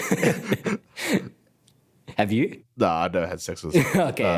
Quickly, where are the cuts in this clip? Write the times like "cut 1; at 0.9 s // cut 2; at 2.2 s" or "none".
none

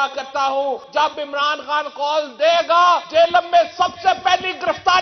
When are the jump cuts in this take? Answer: cut 1; at 0.8 s // cut 2; at 3.1 s

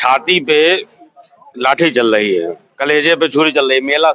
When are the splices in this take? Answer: none

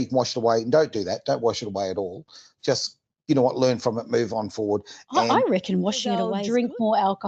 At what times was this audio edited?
cut 1; at 6.4 s

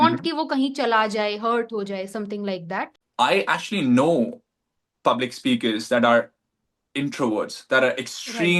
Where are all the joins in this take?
cut 1; at 3.0 s

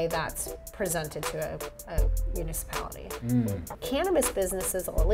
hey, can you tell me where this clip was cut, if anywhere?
cut 1; at 3.7 s

